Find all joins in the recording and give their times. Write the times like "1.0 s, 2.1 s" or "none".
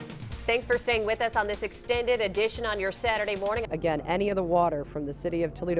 3.6 s

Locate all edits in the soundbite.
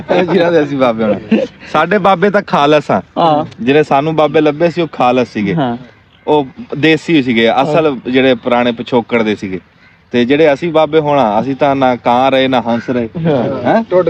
none

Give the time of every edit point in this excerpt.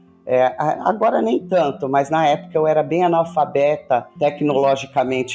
4.1 s

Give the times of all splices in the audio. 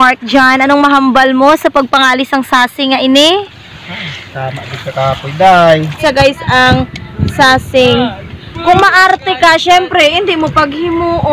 6.0 s

